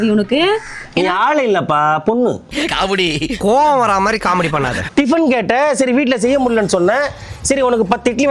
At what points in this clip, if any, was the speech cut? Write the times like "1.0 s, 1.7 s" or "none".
4.8 s